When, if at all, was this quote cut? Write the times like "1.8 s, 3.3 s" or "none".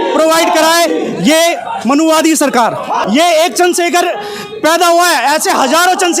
3.0 s